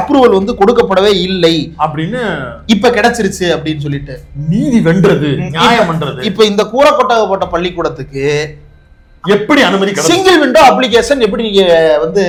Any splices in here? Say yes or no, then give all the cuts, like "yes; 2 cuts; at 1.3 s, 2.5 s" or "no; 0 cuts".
no; 0 cuts